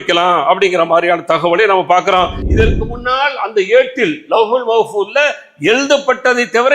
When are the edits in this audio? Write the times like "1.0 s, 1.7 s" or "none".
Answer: 2.4 s